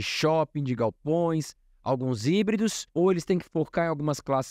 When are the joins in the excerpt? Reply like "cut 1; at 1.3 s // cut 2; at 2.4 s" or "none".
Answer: cut 1; at 2.8 s